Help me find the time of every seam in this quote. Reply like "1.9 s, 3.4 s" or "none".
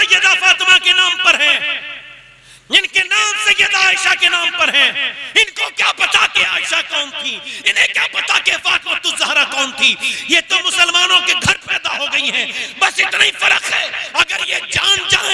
none